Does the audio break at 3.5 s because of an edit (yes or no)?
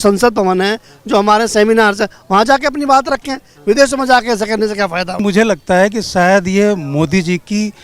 no